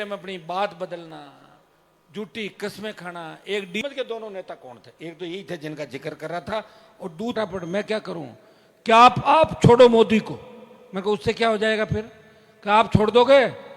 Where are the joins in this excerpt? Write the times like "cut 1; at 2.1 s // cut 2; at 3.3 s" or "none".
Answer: cut 1; at 3.8 s // cut 2; at 7.3 s